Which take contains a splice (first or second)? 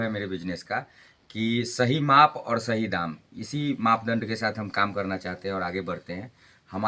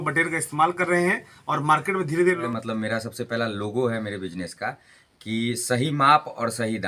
second